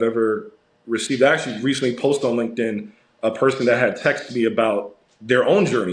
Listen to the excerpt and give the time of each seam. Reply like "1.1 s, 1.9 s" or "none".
none